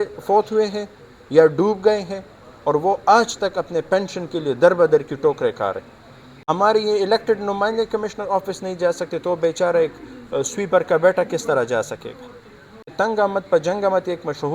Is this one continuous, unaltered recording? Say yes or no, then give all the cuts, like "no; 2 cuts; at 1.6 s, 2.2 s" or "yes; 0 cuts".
no; 2 cuts; at 6.5 s, 12.9 s